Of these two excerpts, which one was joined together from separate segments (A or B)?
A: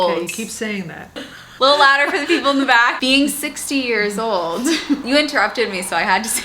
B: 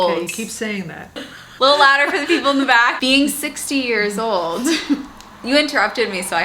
A